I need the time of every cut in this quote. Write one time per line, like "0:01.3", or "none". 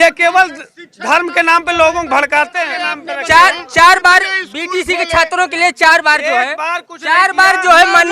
0:02.6